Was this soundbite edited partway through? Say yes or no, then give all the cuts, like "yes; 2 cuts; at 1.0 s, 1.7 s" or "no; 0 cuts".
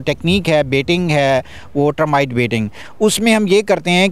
no; 0 cuts